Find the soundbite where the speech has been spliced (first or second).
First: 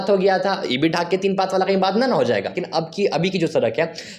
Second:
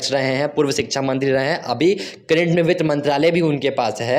first